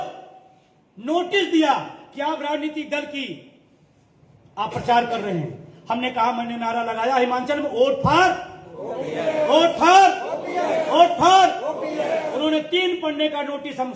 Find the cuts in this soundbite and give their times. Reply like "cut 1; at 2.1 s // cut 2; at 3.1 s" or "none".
none